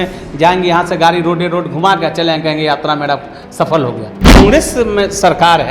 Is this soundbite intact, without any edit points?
no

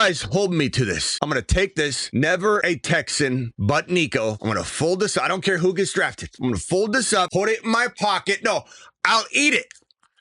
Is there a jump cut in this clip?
yes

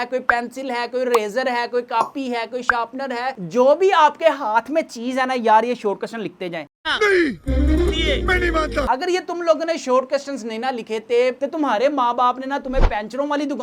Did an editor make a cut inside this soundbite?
no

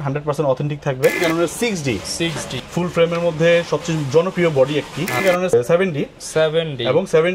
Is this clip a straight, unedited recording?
no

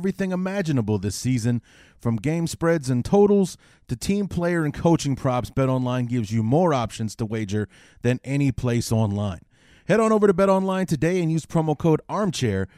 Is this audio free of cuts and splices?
yes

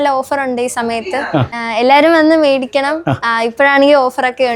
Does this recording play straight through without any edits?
yes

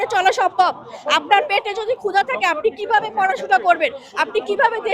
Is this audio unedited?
yes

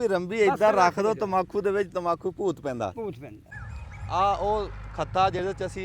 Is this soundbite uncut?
no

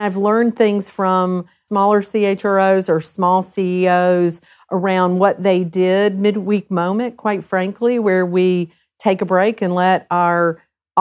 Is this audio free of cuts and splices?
no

